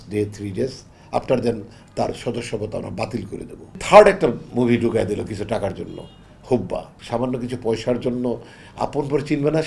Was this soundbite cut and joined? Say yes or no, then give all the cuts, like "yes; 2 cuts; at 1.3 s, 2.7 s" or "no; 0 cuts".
yes; 2 cuts; at 3.8 s, 6.9 s